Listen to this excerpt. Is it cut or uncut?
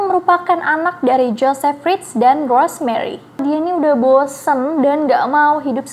cut